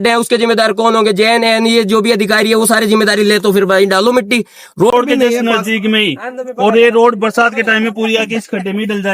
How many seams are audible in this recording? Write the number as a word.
one